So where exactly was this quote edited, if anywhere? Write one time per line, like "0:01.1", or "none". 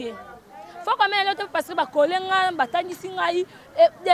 none